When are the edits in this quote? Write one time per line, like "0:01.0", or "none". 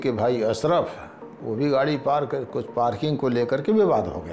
none